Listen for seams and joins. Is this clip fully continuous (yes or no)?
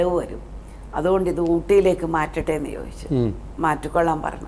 yes